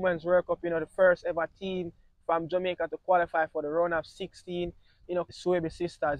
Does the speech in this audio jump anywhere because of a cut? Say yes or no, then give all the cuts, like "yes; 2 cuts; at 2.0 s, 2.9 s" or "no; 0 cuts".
yes; 1 cut; at 5.3 s